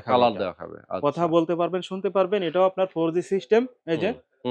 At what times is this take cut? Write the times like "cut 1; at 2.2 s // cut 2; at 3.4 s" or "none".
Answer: none